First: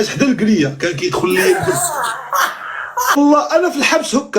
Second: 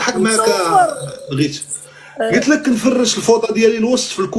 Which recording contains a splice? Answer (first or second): first